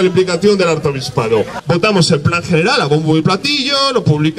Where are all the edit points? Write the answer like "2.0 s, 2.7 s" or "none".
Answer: 1.6 s